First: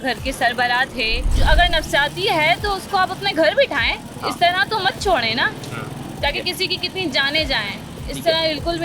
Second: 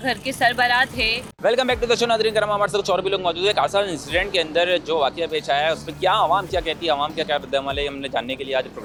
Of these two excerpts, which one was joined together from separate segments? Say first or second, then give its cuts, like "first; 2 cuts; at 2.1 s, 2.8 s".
first; 1 cut; at 1.3 s